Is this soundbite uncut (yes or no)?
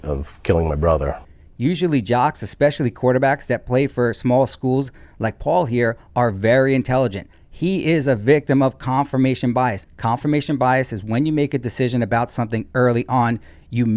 yes